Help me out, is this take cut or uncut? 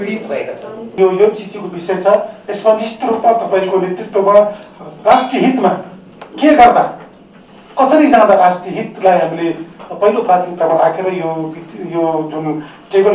cut